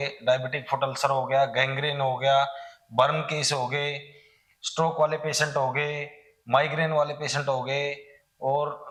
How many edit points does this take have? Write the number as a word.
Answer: zero